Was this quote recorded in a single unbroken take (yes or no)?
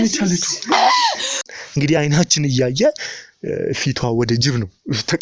no